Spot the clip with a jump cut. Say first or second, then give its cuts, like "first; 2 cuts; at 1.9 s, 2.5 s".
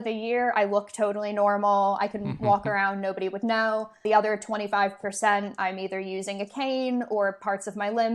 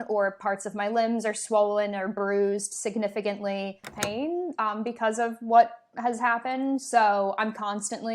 second; 1 cut; at 3.8 s